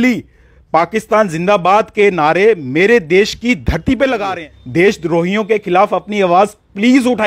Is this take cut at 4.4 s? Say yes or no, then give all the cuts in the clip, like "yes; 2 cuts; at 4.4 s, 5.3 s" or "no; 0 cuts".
yes; 1 cut; at 4.4 s